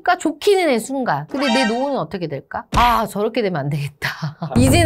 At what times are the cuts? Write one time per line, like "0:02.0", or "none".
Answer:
0:01.3
0:02.7